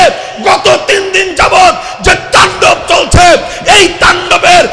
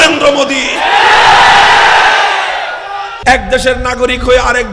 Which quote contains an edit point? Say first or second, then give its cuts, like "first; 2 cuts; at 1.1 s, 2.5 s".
second; 1 cut; at 3.1 s